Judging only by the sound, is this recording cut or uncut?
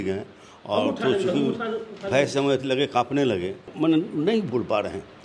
cut